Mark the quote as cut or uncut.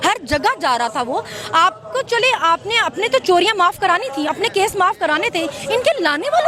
uncut